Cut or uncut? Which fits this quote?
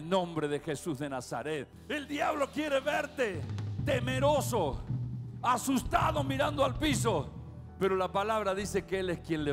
cut